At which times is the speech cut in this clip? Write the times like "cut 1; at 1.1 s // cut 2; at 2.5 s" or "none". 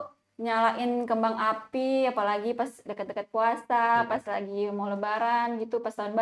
none